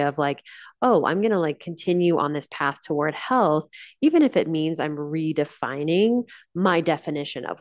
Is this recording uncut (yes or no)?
yes